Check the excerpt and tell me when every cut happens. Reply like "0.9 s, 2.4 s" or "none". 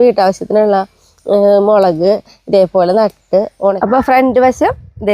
3.8 s